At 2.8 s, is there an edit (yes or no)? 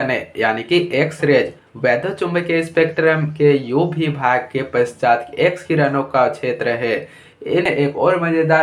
no